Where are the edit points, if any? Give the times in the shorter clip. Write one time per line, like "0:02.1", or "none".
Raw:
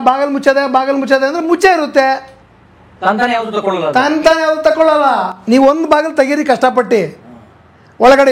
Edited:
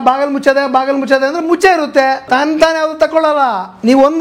0:02.2